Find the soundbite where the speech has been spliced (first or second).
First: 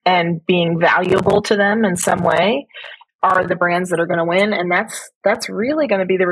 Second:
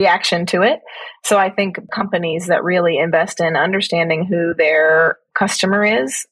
second